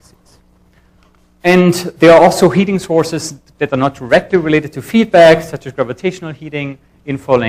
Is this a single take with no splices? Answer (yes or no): no